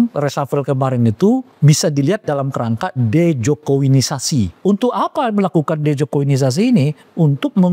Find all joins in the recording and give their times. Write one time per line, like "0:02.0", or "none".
0:01.5
0:04.5